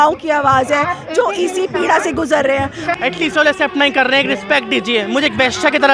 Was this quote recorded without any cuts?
no; 1 cut; at 2.9 s

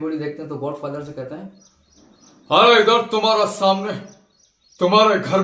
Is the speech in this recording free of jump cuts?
yes; 0 cuts

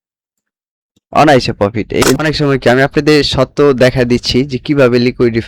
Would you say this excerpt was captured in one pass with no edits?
no; 1 cut; at 2.1 s

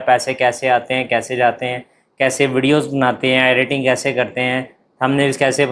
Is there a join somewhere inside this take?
no; 0 cuts

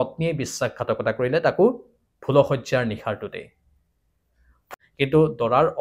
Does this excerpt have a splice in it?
yes; 1 cut; at 4.7 s

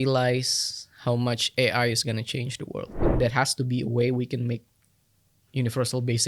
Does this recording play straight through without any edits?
no; 1 cut; at 3.1 s

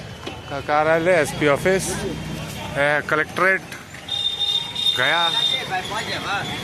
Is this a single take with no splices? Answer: yes; 0 cuts

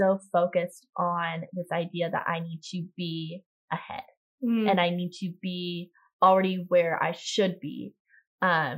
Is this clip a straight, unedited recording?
yes; 0 cuts

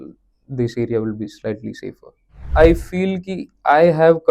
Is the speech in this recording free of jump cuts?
no; 1 cut; at 2.3 s

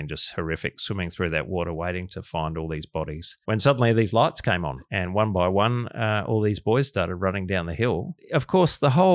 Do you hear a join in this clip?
yes; 3 cuts; at 3.3 s, 4.8 s, 8.2 s

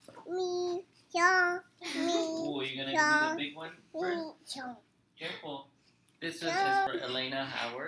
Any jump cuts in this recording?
yes; 1 cut; at 6.9 s

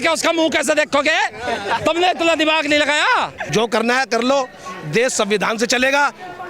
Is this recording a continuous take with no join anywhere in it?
no; 1 cut; at 3.4 s

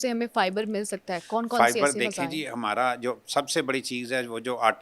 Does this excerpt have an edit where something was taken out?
no; 0 cuts

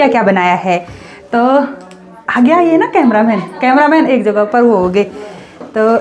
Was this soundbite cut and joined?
no; 0 cuts

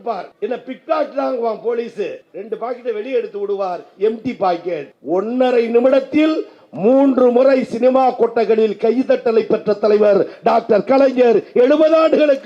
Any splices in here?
no; 0 cuts

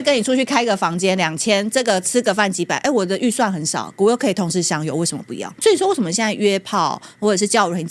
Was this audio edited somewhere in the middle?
yes; 1 cut; at 5.5 s

